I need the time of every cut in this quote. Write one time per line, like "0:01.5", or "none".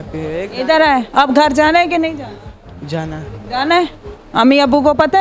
0:01.1